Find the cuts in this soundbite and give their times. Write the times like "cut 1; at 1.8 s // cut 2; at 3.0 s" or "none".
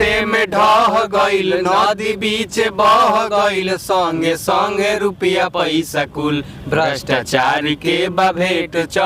none